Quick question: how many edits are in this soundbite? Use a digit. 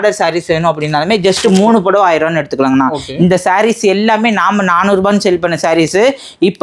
0